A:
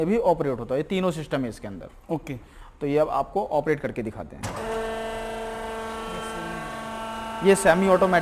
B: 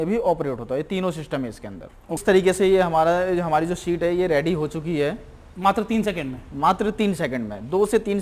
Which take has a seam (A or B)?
B